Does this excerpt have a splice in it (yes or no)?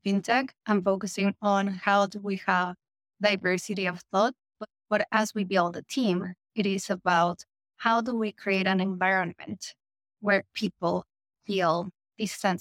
no